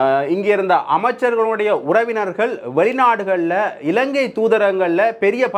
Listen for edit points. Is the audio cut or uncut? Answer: uncut